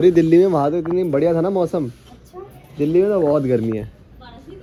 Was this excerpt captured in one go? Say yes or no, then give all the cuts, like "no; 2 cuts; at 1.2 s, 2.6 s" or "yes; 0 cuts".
yes; 0 cuts